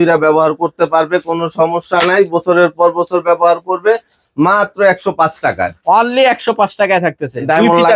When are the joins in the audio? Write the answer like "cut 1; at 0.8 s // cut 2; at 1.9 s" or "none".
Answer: none